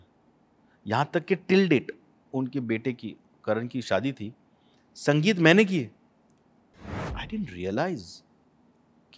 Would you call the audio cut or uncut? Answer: cut